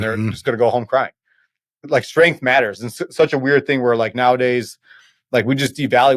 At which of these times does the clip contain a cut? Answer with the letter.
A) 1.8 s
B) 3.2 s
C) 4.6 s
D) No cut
A